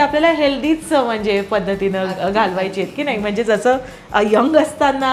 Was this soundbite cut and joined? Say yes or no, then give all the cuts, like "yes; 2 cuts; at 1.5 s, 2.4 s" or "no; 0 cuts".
no; 0 cuts